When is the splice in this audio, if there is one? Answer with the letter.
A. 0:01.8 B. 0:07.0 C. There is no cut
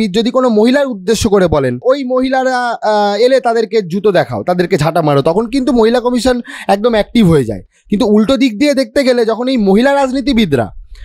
A